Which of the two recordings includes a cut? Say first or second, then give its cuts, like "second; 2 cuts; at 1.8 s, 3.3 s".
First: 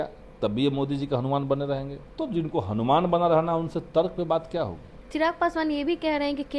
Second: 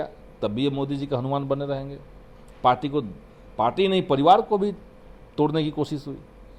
first; 2 cuts; at 2.0 s, 4.9 s